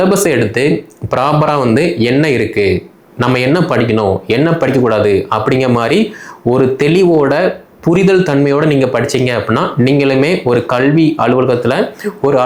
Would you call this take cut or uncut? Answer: uncut